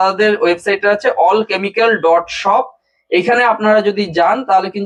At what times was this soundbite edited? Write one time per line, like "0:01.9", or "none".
none